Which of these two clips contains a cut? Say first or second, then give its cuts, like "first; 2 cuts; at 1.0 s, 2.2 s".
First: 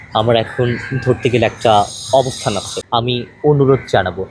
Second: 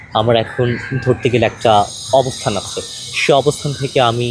first; 1 cut; at 3.2 s